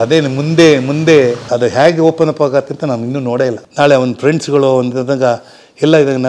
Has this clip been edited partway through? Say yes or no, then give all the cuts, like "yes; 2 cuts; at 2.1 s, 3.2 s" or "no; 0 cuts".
yes; 2 cuts; at 1.4 s, 3.6 s